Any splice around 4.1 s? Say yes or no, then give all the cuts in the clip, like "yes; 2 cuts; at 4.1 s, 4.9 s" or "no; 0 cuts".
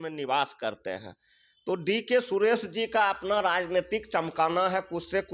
no; 0 cuts